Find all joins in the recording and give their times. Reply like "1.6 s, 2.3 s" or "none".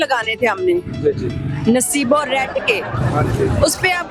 none